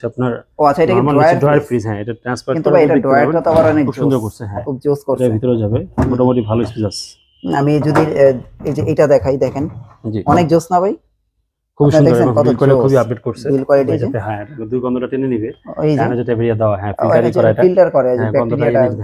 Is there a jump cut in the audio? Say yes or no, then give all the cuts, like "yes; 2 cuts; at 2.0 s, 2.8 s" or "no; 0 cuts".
yes; 1 cut; at 13.9 s